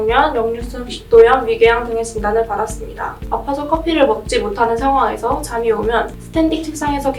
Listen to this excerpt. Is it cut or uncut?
cut